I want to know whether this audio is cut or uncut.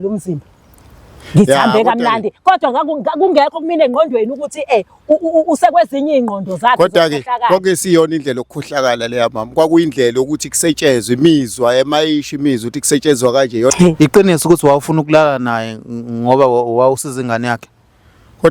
cut